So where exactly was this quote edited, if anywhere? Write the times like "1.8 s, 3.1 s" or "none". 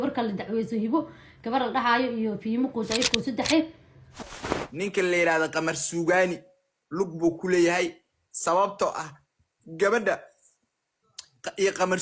4.3 s